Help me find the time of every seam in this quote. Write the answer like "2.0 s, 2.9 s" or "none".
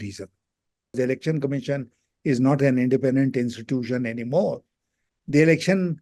0.9 s